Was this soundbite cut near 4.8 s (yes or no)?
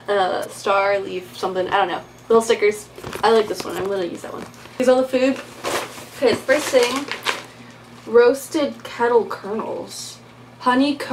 yes